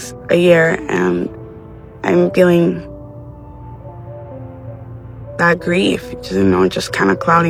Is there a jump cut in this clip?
no; 0 cuts

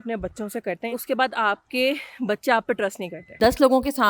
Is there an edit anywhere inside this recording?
yes; 2 cuts; at 1.0 s, 3.4 s

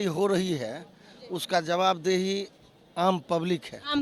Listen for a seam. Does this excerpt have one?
no; 0 cuts

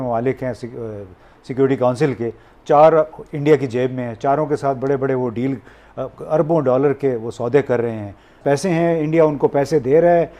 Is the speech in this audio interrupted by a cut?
yes; 1 cut; at 8.4 s

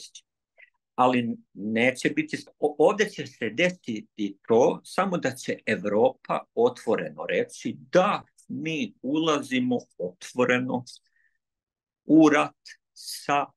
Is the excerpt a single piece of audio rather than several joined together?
no; 1 cut; at 2.5 s

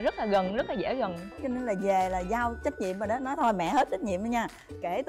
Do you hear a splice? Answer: yes; 1 cut; at 1.3 s

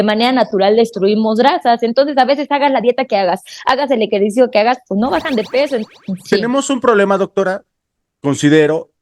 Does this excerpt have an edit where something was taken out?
yes; 1 cut; at 5.8 s

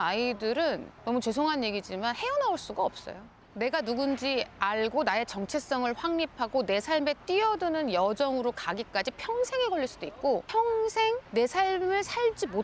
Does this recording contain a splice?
yes; 2 cuts; at 3.4 s, 11.2 s

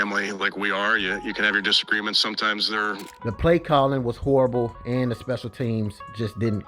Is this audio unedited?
no; 1 cut; at 3.1 s

